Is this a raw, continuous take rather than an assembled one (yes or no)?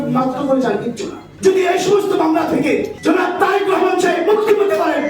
no